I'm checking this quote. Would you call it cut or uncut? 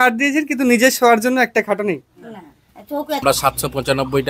cut